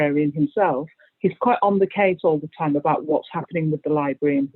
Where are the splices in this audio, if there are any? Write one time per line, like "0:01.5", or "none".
0:01.1